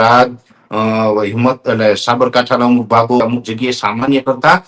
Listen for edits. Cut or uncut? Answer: cut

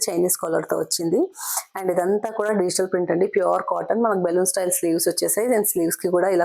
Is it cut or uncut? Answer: uncut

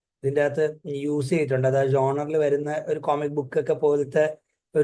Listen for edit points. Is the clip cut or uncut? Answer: uncut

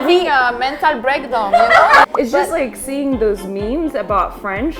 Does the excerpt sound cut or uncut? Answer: cut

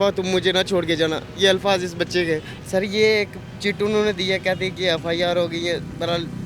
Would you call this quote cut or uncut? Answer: cut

